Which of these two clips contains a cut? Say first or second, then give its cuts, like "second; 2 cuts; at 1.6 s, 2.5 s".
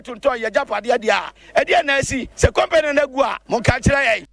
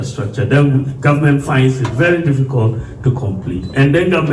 first; 3 cuts; at 1.4 s, 2.2 s, 3.4 s